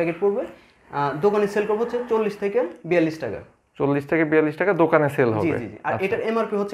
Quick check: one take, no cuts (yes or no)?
yes